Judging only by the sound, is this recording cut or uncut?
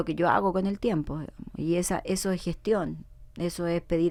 uncut